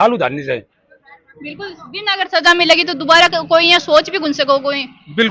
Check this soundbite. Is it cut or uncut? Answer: uncut